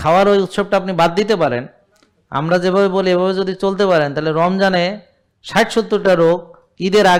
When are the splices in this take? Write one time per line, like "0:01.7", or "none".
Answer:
none